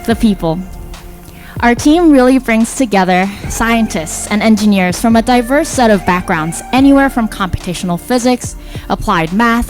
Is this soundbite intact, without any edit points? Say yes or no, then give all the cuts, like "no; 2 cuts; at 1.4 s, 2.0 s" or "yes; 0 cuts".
yes; 0 cuts